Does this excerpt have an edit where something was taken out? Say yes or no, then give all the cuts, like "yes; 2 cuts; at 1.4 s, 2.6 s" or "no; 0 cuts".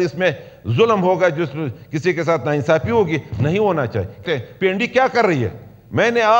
yes; 1 cut; at 4.2 s